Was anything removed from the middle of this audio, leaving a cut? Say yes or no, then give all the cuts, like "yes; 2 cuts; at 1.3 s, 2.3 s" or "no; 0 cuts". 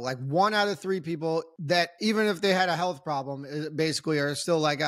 yes; 1 cut; at 1.5 s